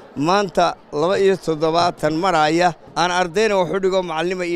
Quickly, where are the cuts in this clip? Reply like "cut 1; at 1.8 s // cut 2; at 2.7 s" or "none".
cut 1; at 2.8 s